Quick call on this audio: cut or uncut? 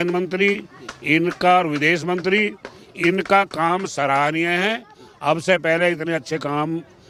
uncut